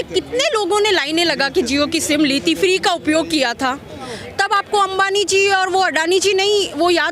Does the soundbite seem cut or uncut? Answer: cut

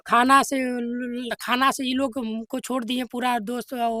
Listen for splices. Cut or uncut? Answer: uncut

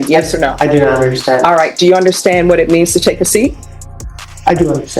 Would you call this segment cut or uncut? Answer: uncut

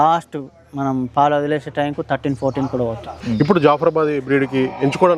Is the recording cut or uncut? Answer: cut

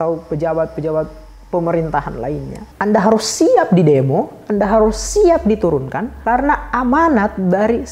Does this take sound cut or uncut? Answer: cut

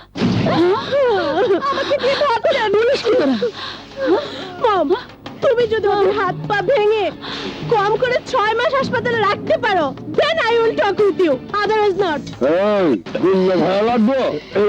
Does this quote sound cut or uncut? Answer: cut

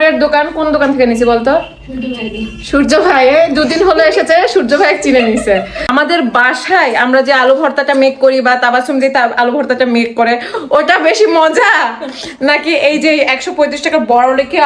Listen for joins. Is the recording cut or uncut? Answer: cut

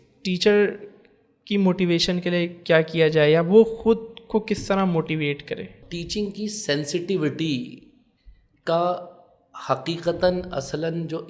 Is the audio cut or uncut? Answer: cut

